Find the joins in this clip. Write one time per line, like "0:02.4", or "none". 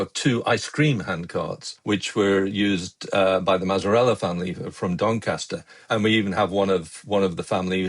0:01.7